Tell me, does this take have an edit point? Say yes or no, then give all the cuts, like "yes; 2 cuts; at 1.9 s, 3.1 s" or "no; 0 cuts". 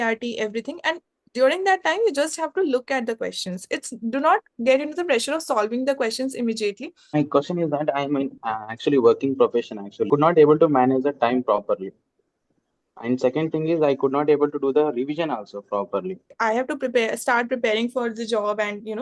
yes; 3 cuts; at 7.2 s, 10.1 s, 16.3 s